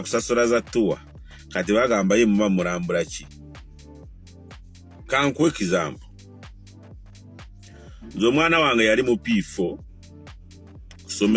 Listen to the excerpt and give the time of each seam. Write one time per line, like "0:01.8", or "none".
none